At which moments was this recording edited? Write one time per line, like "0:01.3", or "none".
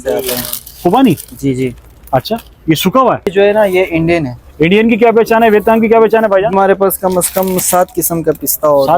0:03.3
0:06.5